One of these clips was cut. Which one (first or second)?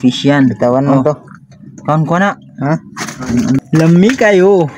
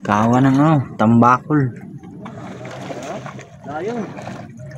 first